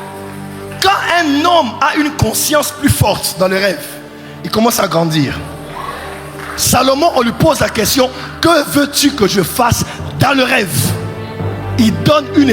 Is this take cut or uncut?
uncut